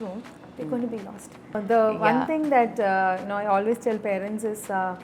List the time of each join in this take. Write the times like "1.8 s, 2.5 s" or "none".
1.5 s